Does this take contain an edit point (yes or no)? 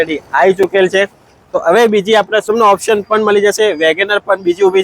yes